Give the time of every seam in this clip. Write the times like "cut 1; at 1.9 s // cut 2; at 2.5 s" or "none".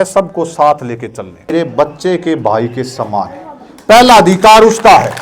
cut 1; at 1.5 s